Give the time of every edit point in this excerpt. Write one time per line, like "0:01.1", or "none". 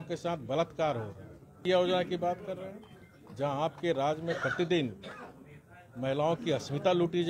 0:01.6